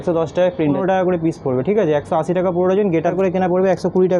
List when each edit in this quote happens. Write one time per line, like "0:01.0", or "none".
0:00.8
0:03.1